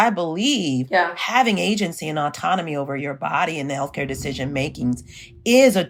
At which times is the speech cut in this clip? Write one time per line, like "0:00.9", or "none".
none

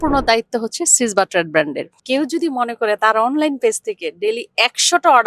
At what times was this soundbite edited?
0:01.9

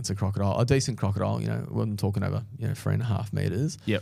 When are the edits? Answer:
none

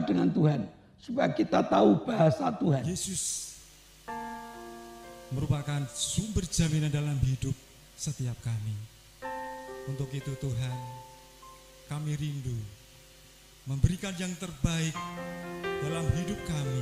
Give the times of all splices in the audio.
0:02.9

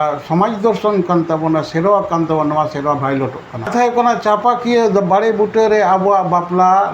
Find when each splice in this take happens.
0:03.7

